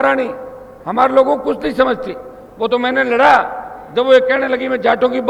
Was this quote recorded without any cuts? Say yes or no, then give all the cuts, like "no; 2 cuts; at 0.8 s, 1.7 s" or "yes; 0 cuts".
yes; 0 cuts